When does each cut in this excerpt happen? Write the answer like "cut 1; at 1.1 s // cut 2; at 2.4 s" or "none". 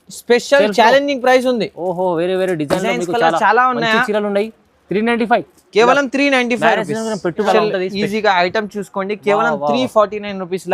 cut 1; at 7.5 s